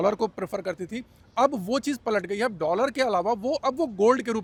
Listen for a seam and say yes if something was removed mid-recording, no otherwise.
no